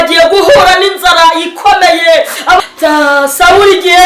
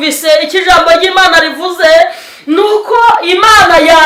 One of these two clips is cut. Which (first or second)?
first